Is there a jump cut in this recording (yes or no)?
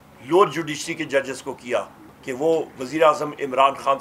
yes